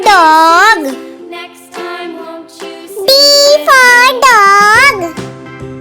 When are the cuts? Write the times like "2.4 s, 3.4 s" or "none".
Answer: 1.0 s, 2.4 s, 5.1 s